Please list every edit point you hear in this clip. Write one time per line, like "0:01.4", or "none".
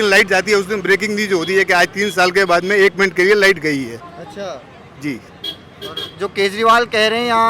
none